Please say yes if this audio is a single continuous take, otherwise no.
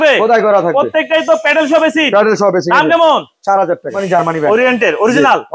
no